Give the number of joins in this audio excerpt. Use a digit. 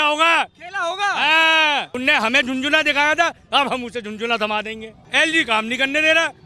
2